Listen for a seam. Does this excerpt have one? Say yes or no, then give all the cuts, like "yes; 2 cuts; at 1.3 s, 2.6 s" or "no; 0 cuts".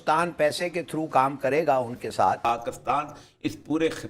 yes; 1 cut; at 2.4 s